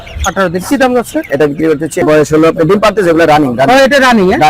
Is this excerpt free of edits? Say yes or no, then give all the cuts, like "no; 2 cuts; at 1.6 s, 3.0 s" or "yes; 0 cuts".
no; 1 cut; at 2.0 s